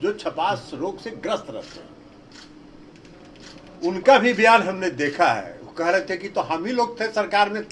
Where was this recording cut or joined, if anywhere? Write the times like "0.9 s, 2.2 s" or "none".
none